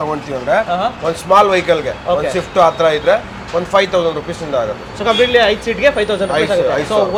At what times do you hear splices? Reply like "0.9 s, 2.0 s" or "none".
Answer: none